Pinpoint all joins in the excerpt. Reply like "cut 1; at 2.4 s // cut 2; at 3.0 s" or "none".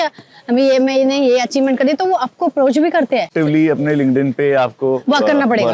cut 1; at 3.3 s